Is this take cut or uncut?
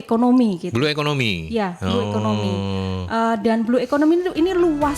uncut